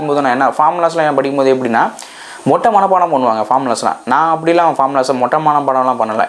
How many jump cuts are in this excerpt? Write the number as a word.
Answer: zero